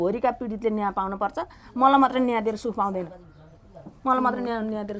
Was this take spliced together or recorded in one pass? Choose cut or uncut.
uncut